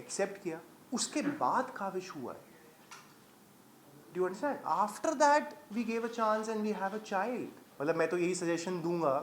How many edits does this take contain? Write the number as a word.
one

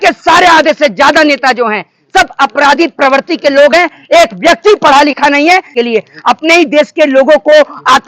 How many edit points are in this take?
one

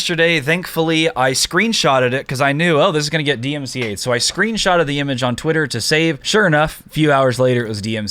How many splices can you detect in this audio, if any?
one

